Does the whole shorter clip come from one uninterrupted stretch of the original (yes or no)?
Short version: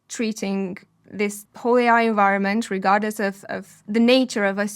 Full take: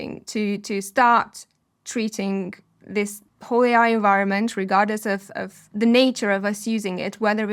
no